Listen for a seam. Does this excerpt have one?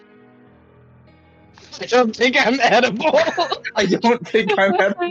no; 0 cuts

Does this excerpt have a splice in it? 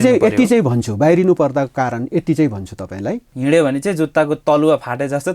yes; 1 cut; at 3.3 s

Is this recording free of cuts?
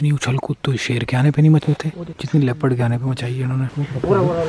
yes; 0 cuts

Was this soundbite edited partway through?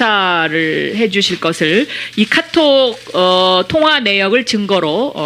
no; 0 cuts

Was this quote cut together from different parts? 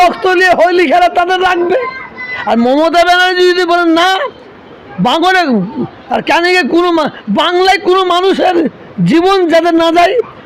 no; 0 cuts

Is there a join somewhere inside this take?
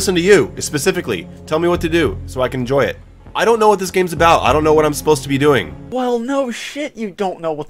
no; 0 cuts

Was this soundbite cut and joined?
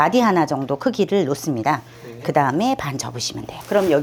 no; 0 cuts

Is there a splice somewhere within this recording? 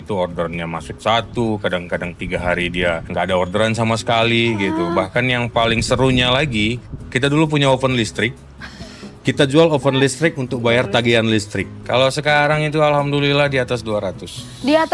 yes; 2 cuts; at 3.0 s, 11.7 s

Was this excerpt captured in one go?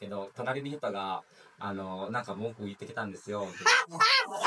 yes; 0 cuts

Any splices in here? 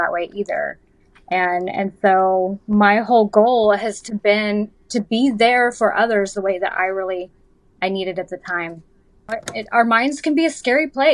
yes; 1 cut; at 9.4 s

